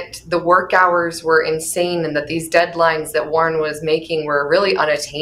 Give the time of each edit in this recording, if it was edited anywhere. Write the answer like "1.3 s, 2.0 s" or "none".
none